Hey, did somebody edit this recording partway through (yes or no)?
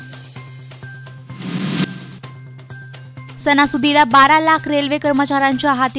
yes